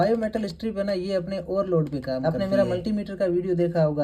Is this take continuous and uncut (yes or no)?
no